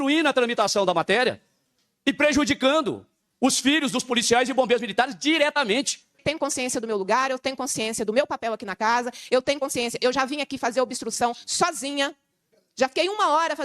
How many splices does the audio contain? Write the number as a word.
one